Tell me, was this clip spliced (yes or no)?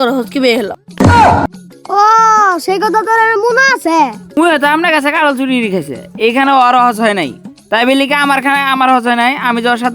yes